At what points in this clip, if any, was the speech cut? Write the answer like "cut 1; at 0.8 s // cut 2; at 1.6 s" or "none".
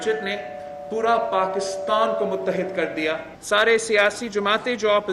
cut 1; at 3.3 s